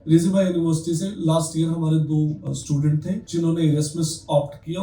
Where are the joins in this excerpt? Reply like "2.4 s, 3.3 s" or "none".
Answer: 2.7 s